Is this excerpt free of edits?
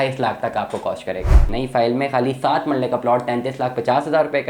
no; 1 cut; at 1.5 s

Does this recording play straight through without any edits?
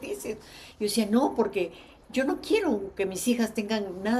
yes; 0 cuts

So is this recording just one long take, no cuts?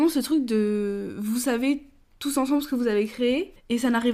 yes; 0 cuts

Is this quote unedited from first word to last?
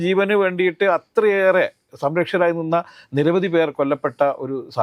yes; 0 cuts

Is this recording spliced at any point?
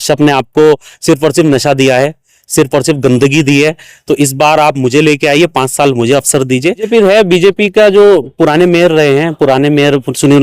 yes; 1 cut; at 6.9 s

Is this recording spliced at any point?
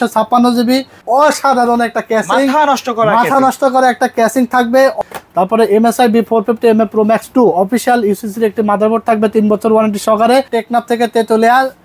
yes; 3 cuts; at 1.0 s, 5.0 s, 10.6 s

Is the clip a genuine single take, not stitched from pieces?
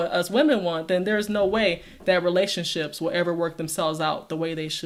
yes; 0 cuts

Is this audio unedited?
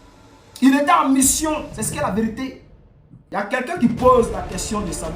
no; 1 cut; at 3.2 s

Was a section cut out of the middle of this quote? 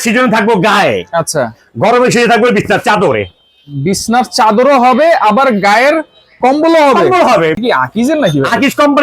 yes; 1 cut; at 7.6 s

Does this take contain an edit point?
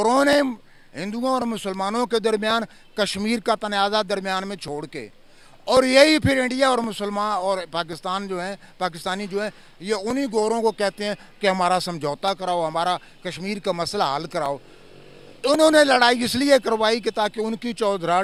no; 0 cuts

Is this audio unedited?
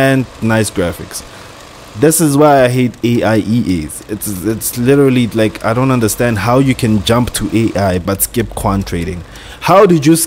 no; 1 cut; at 8.0 s

